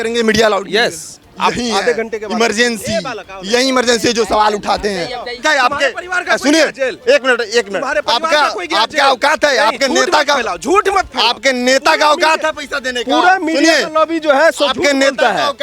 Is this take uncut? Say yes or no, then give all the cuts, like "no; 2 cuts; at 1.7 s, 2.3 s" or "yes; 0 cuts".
no; 1 cut; at 5.4 s